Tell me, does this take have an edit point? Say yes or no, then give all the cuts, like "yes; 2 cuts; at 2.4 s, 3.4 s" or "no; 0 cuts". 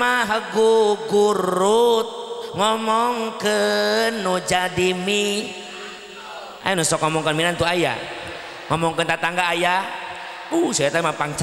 no; 0 cuts